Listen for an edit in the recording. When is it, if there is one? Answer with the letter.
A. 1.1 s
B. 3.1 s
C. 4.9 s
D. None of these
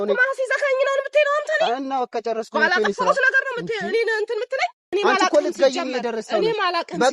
C